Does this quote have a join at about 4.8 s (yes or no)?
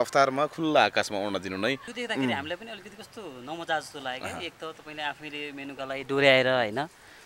no